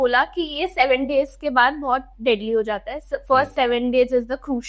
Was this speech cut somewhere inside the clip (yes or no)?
no